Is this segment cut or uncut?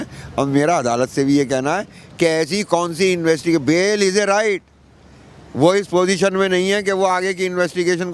uncut